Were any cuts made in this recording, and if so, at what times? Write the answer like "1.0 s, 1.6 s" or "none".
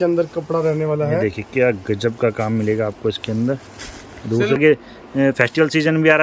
4.6 s